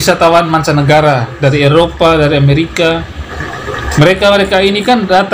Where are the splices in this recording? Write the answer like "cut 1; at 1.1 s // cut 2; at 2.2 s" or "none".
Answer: cut 1; at 3.2 s